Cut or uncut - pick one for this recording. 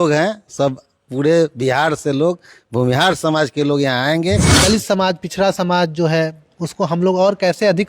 cut